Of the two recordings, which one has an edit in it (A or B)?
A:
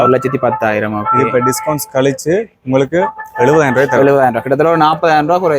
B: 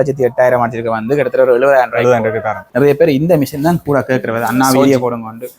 B